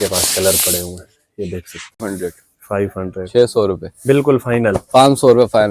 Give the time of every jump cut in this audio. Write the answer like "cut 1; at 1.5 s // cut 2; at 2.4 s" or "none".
cut 1; at 2.0 s